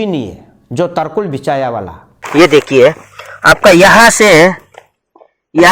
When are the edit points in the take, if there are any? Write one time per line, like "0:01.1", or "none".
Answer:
0:02.2